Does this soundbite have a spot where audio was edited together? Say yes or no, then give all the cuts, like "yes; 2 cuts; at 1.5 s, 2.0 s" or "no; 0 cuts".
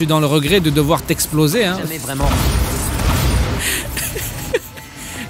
no; 0 cuts